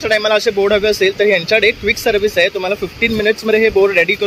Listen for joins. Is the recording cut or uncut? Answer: uncut